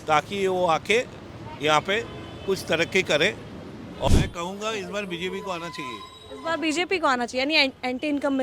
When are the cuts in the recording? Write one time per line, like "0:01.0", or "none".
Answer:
0:04.1